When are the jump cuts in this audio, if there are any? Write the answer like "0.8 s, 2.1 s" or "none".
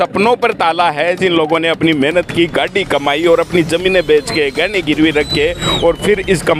none